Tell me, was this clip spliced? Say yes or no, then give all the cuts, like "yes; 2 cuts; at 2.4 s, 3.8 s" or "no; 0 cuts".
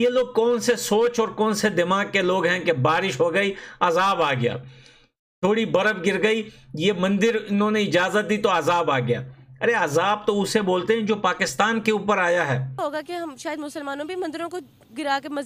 yes; 1 cut; at 12.7 s